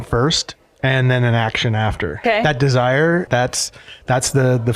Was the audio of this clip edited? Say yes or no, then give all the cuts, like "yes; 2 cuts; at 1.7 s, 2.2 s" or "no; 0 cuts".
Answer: yes; 2 cuts; at 2.2 s, 3.3 s